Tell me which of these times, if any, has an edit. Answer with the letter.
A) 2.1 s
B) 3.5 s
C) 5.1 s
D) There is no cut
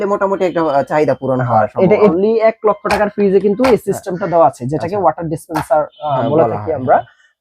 A